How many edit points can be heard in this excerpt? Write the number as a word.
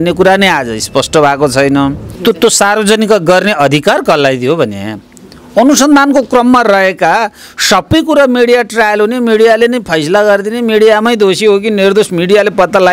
one